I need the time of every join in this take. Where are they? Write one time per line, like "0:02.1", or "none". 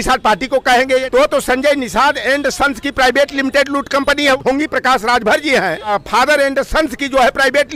0:01.1
0:04.4
0:05.9

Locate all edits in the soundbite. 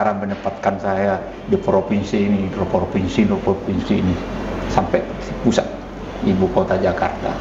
none

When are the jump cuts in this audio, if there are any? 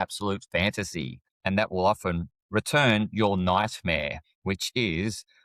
0:01.2
0:02.3

